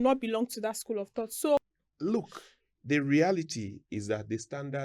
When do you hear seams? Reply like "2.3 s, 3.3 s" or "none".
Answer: 1.6 s